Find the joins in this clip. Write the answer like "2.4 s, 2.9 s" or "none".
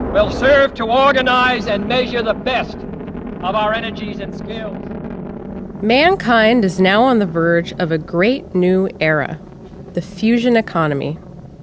9.1 s